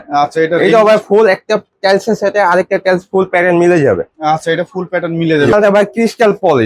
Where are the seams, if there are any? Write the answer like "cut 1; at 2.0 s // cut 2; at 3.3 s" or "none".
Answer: cut 1; at 5.5 s